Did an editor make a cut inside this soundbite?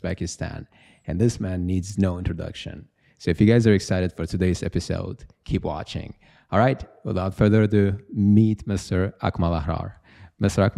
no; 0 cuts

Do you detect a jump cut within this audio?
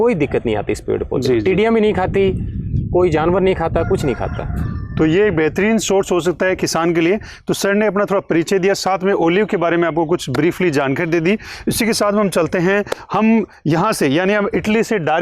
no; 0 cuts

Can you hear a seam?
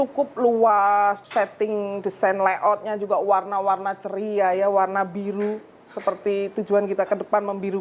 yes; 1 cut; at 1.2 s

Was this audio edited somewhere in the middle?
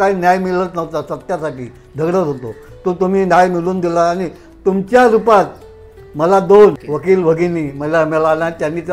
yes; 1 cut; at 6.8 s

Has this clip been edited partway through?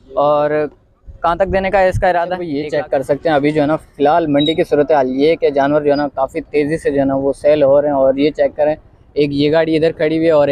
yes; 1 cut; at 2.6 s

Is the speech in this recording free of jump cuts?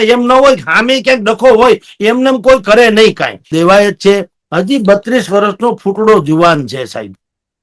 no; 1 cut; at 3.5 s

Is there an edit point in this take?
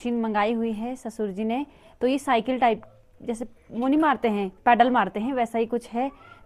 no; 0 cuts

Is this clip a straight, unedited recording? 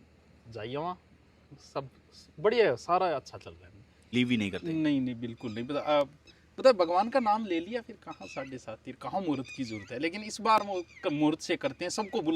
no; 1 cut; at 4.1 s

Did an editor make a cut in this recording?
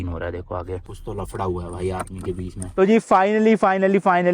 yes; 1 cut; at 2.6 s

